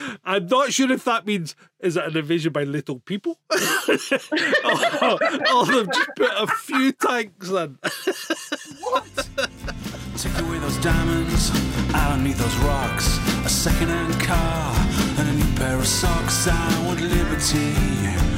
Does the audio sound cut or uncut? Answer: cut